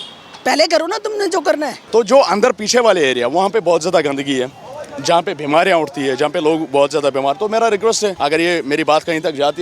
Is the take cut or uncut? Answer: cut